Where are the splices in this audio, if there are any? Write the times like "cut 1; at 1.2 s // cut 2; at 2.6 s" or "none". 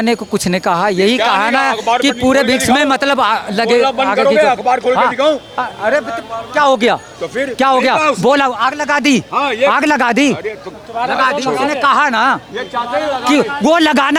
none